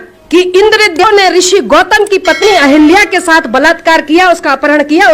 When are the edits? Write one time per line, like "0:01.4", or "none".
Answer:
0:01.0